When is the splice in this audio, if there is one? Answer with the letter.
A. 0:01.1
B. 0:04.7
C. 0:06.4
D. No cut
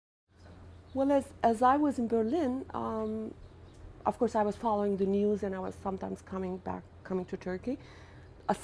B